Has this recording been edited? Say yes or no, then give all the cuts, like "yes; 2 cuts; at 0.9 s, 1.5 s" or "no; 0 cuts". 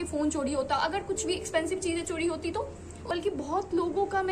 yes; 1 cut; at 3.1 s